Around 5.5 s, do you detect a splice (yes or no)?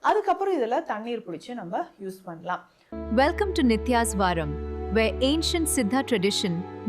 no